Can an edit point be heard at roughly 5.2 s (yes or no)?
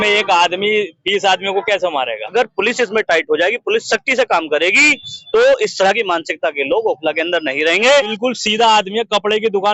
no